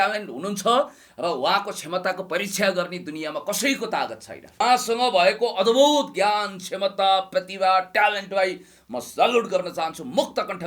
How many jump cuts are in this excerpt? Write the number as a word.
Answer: one